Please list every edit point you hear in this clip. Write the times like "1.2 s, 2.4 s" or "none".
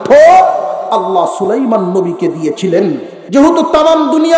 3.1 s